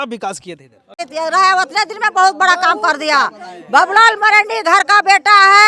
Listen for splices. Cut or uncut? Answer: cut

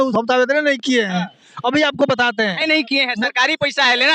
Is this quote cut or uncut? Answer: uncut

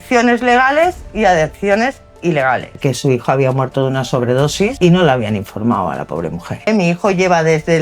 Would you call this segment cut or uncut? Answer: cut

